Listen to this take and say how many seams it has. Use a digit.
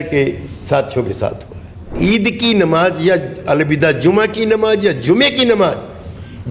1